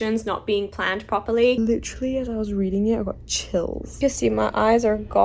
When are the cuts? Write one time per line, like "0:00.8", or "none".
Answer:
0:01.6
0:04.0